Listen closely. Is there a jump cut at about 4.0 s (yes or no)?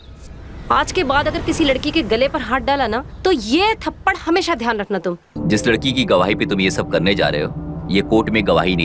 no